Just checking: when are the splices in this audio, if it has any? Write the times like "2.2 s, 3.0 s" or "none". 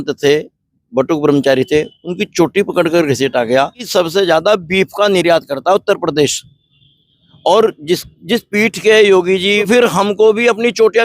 3.8 s, 9.7 s